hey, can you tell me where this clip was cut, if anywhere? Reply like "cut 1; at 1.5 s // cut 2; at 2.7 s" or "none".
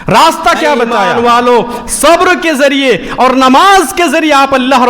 cut 1; at 1.1 s

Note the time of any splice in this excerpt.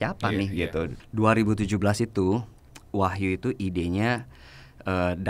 cut 1; at 1.0 s

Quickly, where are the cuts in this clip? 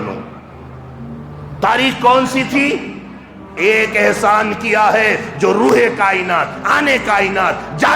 cut 1; at 3.5 s

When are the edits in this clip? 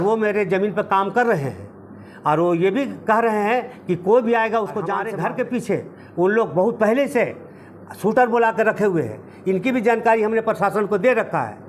cut 1; at 4.9 s

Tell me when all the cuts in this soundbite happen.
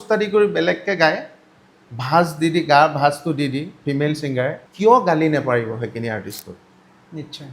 cut 1; at 4.6 s

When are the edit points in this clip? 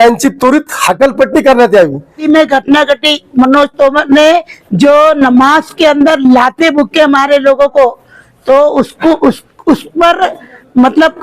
cut 1; at 2.1 s

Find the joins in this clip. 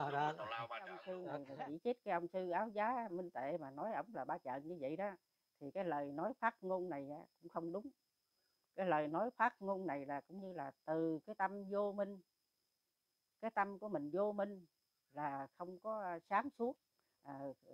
cut 1; at 1.2 s

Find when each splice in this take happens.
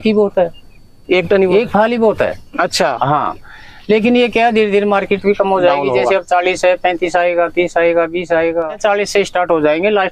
none

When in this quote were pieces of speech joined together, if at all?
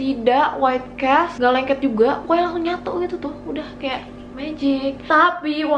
cut 1; at 1.3 s // cut 2; at 5.0 s

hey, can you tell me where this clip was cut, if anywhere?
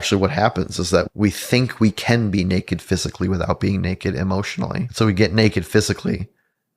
cut 1; at 1.1 s // cut 2; at 4.9 s

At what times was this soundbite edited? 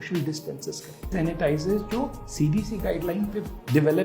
cut 1; at 1.1 s

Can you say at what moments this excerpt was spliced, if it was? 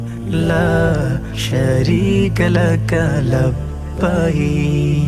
none

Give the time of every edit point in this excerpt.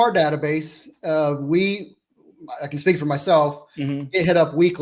none

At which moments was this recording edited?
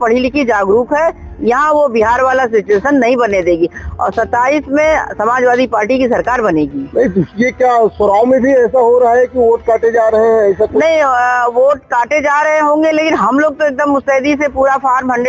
none

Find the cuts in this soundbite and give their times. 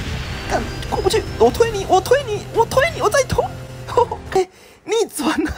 cut 1; at 4.4 s

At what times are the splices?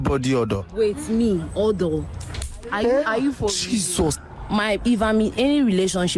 cut 1; at 4.3 s

